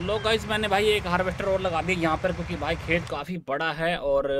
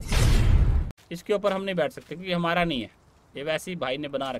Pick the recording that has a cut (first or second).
second